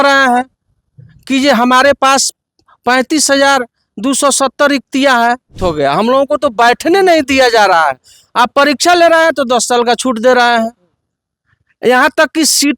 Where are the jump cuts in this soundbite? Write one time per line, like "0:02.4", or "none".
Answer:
0:05.6